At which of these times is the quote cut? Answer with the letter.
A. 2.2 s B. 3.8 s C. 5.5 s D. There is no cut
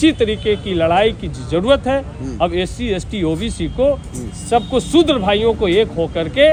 D